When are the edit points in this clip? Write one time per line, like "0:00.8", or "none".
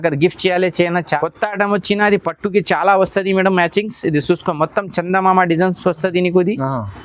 0:01.2